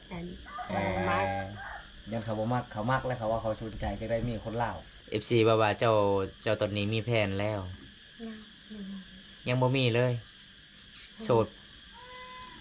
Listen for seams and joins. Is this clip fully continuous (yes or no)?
no